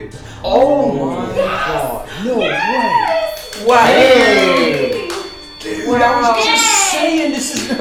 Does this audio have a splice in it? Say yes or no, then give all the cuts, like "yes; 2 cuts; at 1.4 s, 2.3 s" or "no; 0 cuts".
no; 0 cuts